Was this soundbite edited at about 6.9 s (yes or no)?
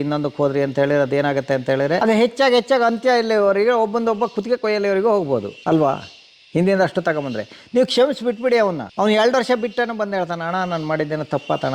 no